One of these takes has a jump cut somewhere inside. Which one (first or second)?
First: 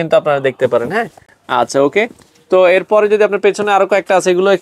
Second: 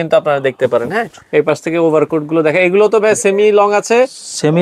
second